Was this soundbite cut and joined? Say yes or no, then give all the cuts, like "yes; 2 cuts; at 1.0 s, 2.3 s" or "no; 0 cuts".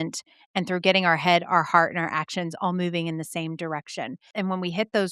yes; 1 cut; at 4.2 s